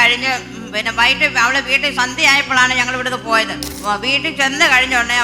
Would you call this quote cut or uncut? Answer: cut